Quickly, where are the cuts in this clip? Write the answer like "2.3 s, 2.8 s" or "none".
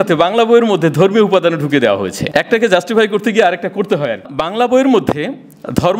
2.2 s, 4.2 s